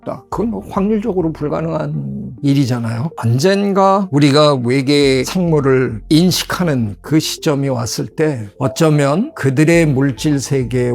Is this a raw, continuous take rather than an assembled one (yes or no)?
no